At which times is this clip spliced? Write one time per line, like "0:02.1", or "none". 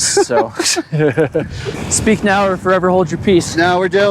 0:01.7